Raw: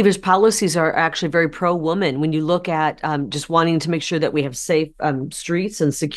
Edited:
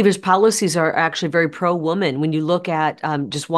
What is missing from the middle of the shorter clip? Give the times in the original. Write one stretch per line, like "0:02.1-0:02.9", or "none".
none